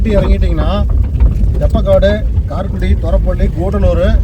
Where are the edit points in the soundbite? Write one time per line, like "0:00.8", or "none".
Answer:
none